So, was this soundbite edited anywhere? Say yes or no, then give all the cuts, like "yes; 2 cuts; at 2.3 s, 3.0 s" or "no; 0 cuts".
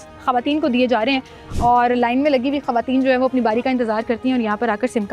no; 0 cuts